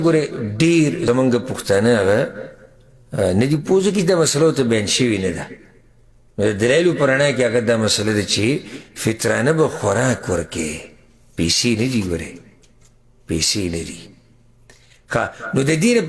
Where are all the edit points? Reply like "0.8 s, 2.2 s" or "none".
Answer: 1.0 s